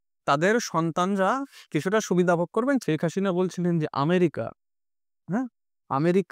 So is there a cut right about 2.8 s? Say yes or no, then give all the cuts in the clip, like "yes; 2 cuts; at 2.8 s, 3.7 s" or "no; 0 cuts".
yes; 1 cut; at 2.8 s